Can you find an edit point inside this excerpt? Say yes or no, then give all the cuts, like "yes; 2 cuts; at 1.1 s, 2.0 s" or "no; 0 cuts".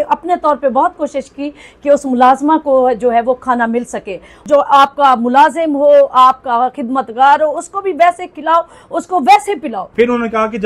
yes; 2 cuts; at 4.4 s, 9.8 s